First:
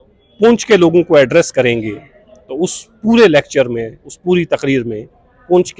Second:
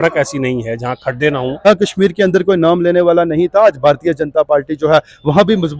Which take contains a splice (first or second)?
second